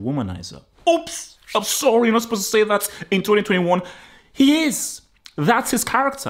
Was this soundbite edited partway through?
no; 0 cuts

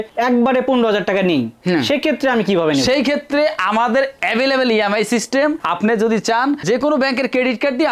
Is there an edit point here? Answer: no; 0 cuts

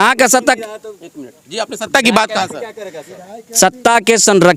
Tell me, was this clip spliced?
no; 0 cuts

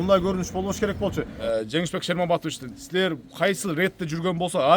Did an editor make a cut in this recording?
yes; 1 cut; at 1.4 s

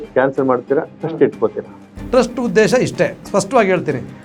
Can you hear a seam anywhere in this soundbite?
yes; 1 cut; at 1.9 s

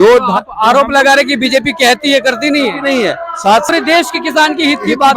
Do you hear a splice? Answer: yes; 1 cut; at 3.7 s

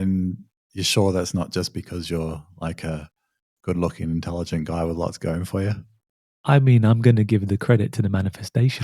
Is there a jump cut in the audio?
no; 0 cuts

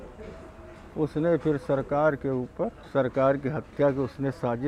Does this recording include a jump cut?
yes; 1 cut; at 2.8 s

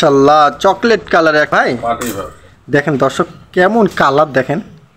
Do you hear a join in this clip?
yes; 1 cut; at 1.5 s

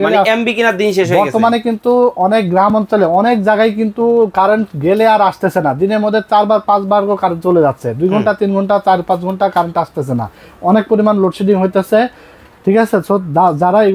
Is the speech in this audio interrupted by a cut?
no; 0 cuts

